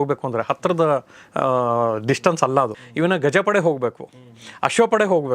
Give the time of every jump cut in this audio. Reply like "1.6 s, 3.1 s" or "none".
2.8 s